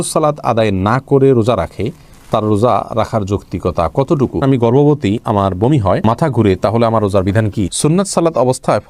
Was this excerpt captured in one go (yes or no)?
no